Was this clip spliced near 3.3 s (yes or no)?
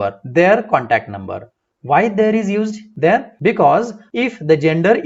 yes